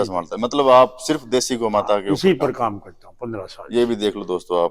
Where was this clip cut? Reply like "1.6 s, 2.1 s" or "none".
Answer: none